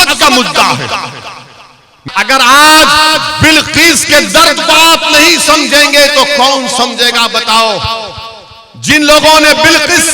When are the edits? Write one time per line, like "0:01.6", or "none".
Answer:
0:02.0